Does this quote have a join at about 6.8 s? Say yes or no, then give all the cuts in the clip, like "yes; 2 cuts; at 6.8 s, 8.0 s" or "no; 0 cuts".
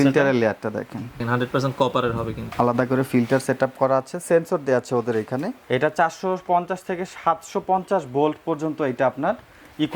no; 3 cuts; at 1.2 s, 2.4 s, 5.5 s